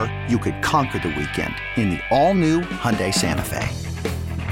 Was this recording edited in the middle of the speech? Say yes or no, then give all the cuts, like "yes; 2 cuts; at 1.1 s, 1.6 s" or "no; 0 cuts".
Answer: no; 0 cuts